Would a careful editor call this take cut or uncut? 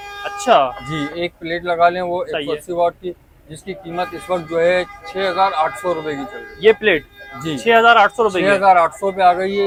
uncut